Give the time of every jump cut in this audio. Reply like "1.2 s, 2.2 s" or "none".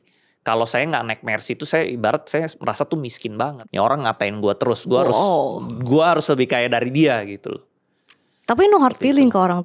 3.6 s